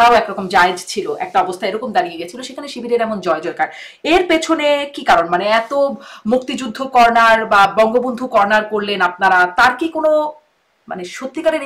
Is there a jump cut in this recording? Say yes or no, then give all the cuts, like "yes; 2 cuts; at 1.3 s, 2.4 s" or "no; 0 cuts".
no; 0 cuts